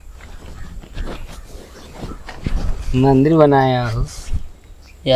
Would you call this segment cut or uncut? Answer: uncut